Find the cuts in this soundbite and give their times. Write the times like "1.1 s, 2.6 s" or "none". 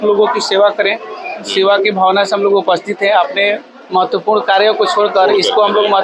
none